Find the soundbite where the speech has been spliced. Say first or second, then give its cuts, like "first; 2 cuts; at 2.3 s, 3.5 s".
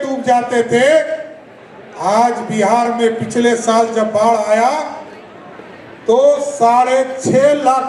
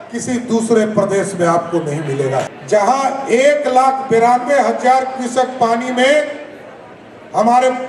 second; 1 cut; at 2.5 s